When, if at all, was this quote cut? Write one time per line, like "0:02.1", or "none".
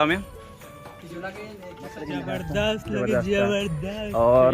0:02.0